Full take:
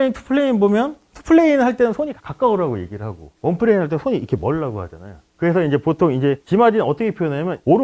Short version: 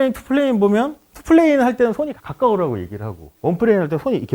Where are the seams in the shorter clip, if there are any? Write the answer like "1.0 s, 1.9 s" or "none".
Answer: none